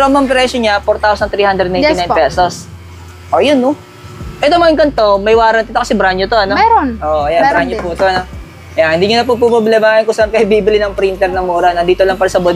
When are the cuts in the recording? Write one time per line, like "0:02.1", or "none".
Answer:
none